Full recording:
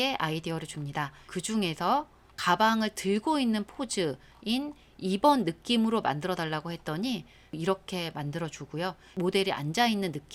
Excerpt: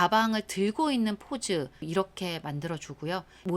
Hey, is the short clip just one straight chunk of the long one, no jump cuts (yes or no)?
no